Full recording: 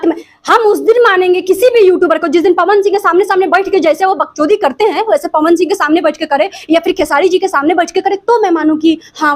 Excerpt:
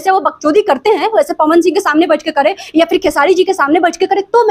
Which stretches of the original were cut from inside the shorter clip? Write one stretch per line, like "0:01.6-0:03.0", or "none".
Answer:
none